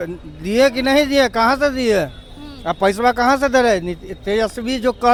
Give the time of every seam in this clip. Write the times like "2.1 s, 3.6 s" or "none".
none